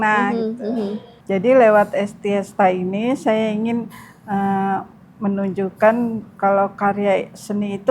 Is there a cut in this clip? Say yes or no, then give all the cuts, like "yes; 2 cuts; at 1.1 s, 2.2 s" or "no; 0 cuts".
yes; 1 cut; at 1.1 s